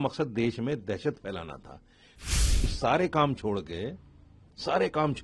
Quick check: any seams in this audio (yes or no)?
yes